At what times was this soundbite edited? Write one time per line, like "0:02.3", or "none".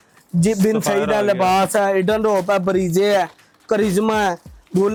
none